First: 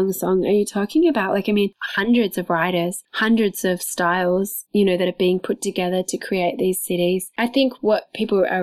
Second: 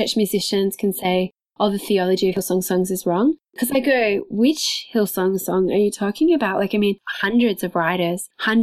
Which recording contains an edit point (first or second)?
first